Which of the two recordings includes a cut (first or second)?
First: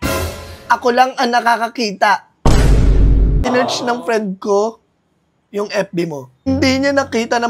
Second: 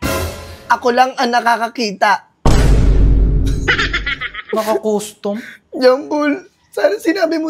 first